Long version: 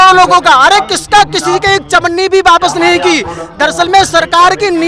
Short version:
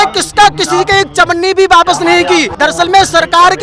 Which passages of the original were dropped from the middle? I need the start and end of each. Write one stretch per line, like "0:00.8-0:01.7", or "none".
0:03.3-0:03.5